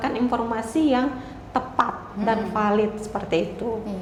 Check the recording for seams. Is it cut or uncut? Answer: uncut